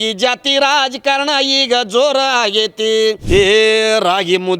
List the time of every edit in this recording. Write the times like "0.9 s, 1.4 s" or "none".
3.2 s